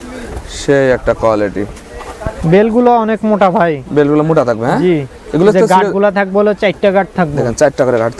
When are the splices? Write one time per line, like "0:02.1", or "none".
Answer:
none